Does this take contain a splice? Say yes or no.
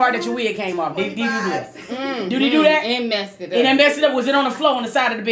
no